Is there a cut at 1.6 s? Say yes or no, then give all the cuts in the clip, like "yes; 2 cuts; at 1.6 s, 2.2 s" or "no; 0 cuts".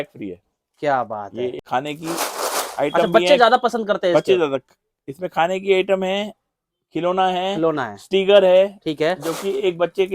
yes; 1 cut; at 1.6 s